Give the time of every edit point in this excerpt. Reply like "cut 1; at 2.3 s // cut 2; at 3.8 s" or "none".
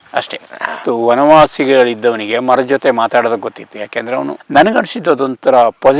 cut 1; at 4.3 s